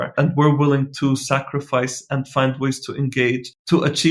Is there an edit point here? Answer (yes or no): no